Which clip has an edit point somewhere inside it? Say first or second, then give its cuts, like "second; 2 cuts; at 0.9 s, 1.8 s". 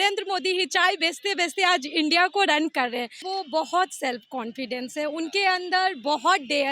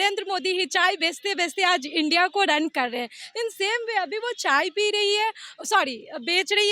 first; 1 cut; at 3.2 s